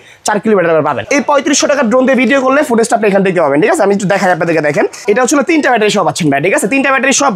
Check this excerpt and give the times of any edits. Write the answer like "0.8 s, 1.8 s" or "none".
1.0 s, 5.0 s